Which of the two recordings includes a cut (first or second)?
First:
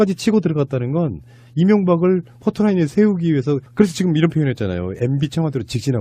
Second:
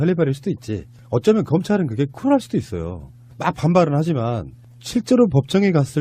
first